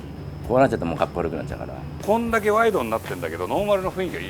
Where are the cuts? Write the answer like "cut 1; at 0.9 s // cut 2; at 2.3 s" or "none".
cut 1; at 2.0 s